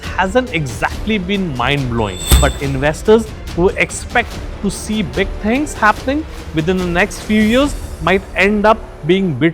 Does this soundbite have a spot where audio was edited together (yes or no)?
yes